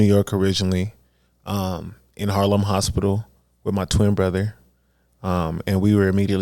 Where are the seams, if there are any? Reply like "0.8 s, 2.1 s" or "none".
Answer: none